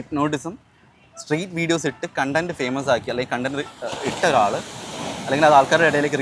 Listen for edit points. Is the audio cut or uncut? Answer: uncut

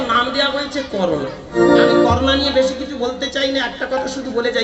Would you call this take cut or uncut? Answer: uncut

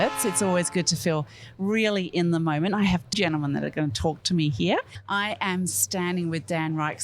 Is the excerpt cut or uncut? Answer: cut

